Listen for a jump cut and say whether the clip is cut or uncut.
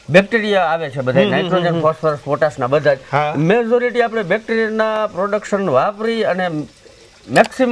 uncut